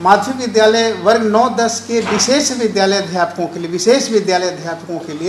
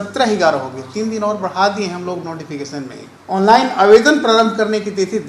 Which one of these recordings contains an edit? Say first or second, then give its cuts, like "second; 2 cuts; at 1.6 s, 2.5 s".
second; 1 cut; at 3.1 s